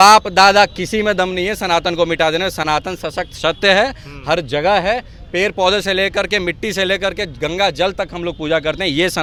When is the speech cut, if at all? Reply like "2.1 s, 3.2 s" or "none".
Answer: none